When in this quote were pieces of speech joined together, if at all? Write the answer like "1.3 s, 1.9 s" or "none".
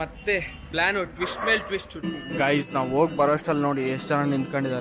1.9 s